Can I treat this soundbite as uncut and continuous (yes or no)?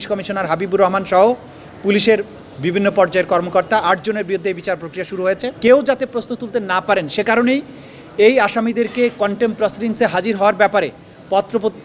no